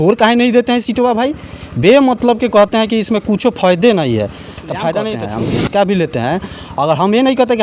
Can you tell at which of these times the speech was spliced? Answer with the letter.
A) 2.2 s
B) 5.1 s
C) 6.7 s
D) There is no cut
B